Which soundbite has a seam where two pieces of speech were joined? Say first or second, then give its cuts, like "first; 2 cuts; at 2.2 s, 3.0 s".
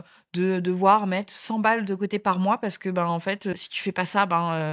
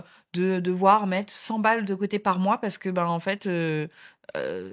first; 1 cut; at 3.5 s